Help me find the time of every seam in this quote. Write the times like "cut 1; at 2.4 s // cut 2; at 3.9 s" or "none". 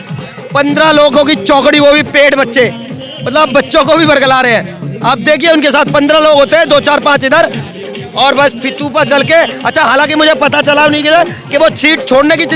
none

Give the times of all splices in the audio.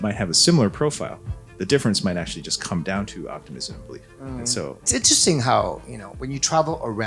cut 1; at 4.9 s

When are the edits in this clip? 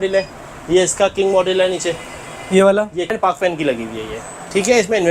cut 1; at 3.2 s

